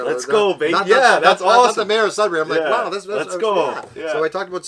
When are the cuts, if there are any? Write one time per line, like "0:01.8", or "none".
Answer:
none